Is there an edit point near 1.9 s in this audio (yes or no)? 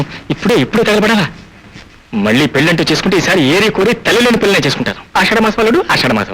no